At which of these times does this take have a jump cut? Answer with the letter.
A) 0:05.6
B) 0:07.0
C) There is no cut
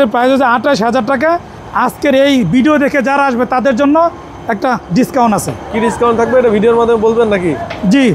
C